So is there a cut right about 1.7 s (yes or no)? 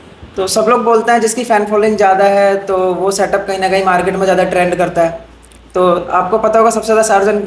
no